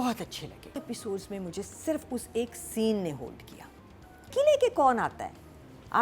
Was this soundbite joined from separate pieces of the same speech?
yes; 2 cuts; at 0.8 s, 4.3 s

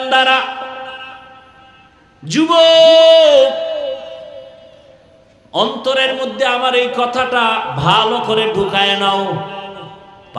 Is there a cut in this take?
no; 0 cuts

